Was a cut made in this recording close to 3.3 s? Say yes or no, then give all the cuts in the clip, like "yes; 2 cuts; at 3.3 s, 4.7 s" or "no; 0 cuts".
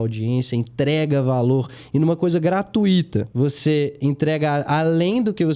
yes; 1 cut; at 3.3 s